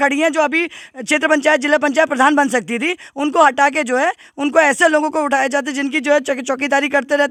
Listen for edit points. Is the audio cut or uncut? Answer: uncut